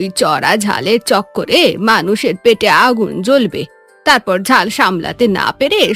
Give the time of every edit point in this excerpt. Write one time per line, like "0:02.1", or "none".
none